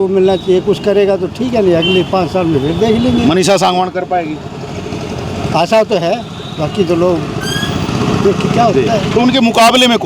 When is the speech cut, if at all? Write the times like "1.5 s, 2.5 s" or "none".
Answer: none